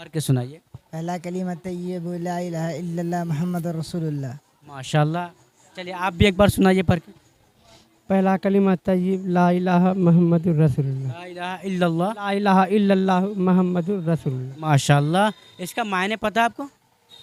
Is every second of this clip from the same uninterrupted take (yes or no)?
yes